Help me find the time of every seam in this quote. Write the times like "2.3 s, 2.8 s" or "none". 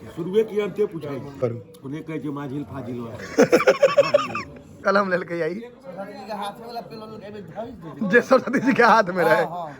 1.4 s, 4.8 s

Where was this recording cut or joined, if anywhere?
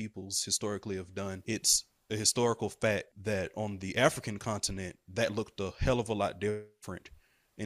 1.4 s, 3.1 s

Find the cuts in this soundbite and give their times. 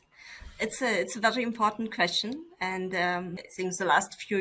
3.4 s

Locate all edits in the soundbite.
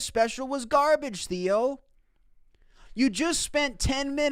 none

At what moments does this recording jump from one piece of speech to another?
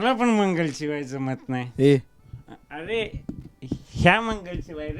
none

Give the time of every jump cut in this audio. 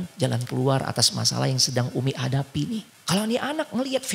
2.9 s

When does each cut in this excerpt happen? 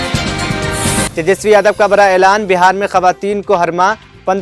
none

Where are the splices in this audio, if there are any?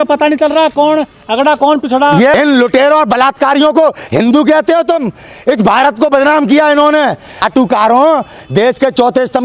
2.4 s, 7.4 s

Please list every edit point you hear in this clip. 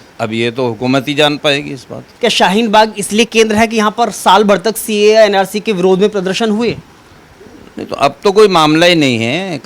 2.1 s

